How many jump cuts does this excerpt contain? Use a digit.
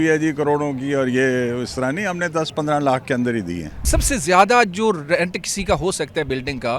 0